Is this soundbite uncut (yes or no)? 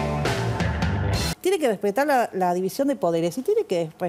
no